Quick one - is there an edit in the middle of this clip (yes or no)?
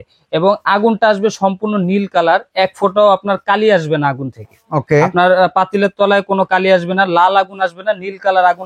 no